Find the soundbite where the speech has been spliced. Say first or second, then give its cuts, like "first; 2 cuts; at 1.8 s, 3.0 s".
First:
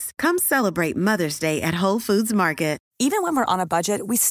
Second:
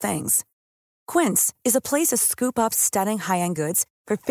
first; 1 cut; at 2.9 s